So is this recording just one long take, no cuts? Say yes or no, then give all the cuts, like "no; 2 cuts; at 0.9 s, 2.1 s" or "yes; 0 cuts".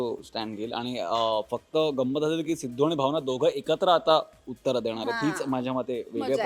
yes; 0 cuts